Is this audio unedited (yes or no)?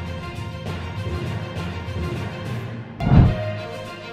no